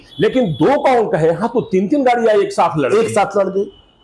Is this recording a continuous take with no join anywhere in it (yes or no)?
yes